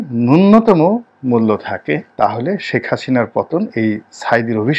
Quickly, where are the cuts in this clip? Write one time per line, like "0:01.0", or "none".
0:02.1